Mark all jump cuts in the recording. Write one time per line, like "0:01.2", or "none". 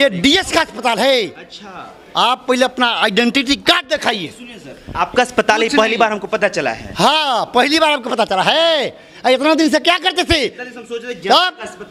none